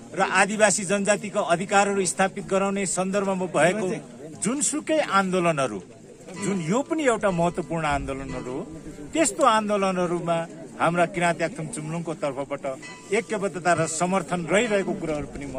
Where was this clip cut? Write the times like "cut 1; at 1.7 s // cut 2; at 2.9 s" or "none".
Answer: none